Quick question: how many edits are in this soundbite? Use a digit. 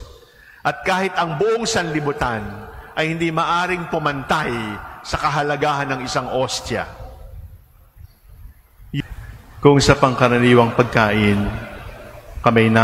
1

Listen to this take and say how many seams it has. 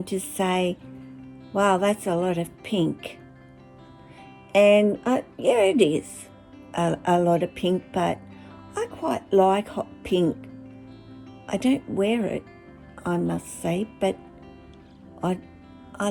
0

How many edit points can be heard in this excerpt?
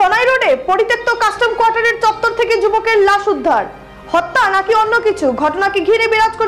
0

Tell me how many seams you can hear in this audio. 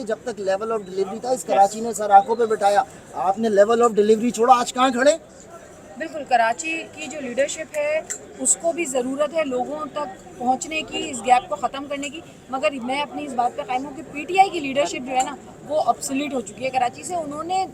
0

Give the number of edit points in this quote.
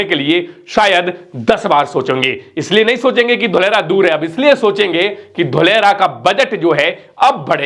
0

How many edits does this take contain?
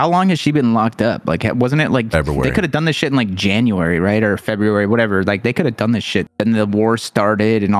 1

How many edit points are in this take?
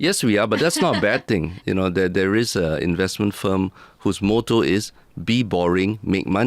1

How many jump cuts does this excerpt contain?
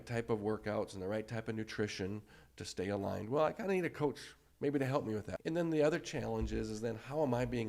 1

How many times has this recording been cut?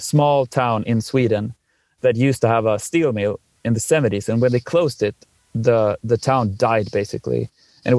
0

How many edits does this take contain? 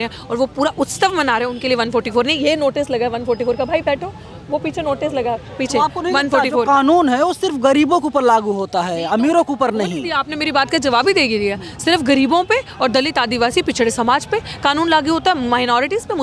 0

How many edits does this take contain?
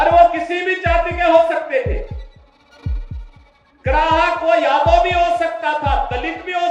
0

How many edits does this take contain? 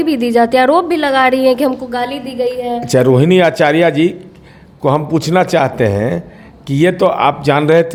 0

